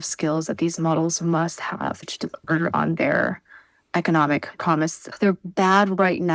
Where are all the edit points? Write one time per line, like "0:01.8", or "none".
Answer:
0:02.0
0:05.0